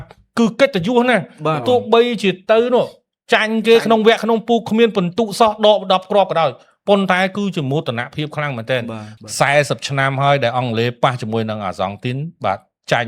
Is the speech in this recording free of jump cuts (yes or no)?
no